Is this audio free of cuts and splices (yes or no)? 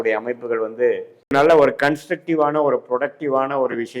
no